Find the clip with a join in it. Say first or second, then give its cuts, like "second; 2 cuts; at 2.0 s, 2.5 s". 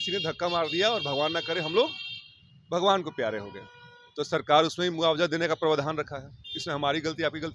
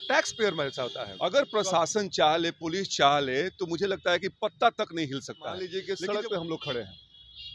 second; 2 cuts; at 1.0 s, 5.7 s